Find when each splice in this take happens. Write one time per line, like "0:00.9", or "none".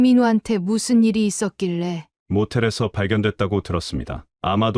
0:02.1